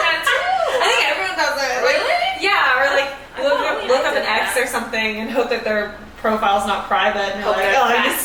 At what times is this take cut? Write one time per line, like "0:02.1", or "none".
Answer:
none